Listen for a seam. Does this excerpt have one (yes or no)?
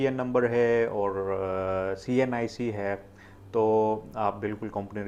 no